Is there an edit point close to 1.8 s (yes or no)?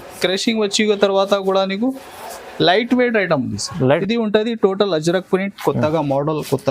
no